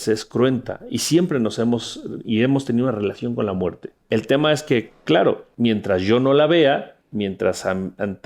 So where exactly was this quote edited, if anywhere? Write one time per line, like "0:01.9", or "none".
0:03.9
0:05.5
0:07.0

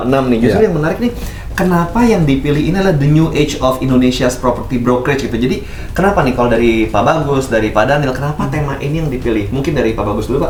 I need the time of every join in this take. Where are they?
none

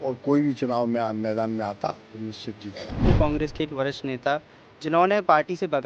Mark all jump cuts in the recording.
0:03.0

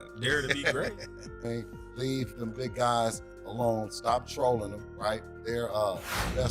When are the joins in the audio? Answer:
0:01.4

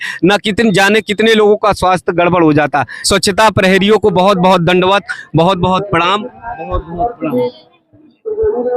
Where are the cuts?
0:03.0

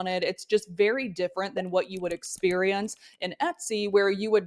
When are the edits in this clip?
none

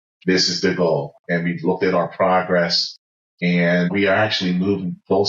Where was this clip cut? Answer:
0:03.9

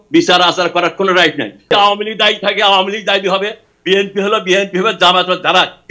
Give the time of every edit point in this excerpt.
0:01.7

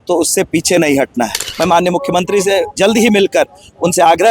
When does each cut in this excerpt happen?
0:01.4

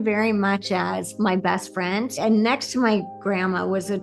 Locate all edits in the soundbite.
0:02.1

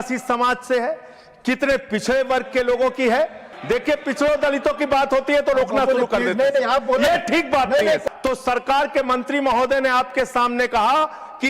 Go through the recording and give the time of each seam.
0:03.5
0:08.0

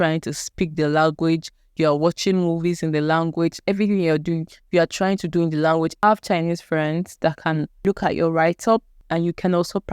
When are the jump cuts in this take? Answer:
0:05.9
0:07.8
0:09.0

